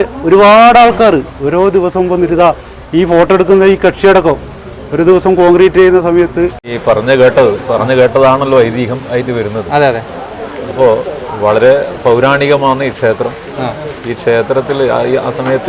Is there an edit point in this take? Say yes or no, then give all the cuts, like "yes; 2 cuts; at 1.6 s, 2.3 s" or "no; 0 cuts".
yes; 1 cut; at 6.7 s